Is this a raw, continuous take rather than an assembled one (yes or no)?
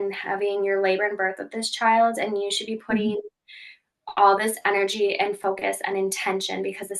yes